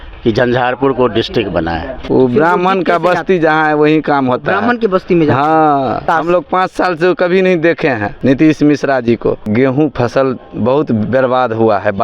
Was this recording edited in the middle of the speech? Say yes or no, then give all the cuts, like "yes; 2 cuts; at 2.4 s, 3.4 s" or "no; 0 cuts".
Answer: yes; 4 cuts; at 1.9 s, 6.0 s, 8.1 s, 9.5 s